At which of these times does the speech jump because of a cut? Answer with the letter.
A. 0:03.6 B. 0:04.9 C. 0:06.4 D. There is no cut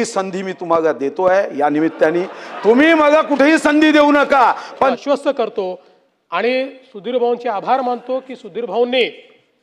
B